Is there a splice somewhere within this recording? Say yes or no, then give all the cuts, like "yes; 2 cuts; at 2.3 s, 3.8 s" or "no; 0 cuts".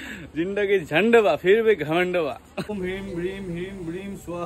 yes; 1 cut; at 2.7 s